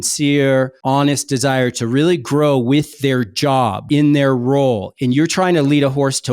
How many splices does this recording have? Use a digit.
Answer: 2